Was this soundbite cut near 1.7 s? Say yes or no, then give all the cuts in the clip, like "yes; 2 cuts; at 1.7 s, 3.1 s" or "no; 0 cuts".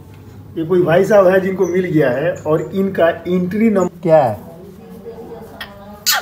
no; 1 cut; at 3.9 s